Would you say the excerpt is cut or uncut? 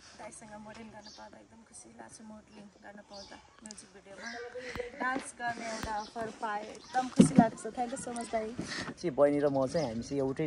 cut